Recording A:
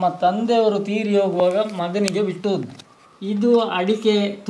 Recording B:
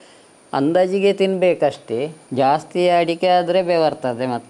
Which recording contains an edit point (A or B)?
B